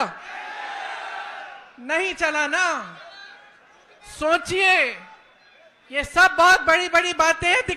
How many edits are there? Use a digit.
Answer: 0